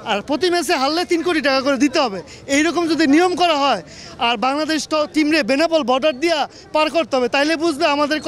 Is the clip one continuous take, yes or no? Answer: yes